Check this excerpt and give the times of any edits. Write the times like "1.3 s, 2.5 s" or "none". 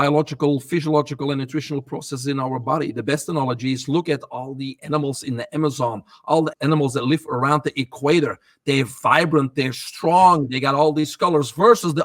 none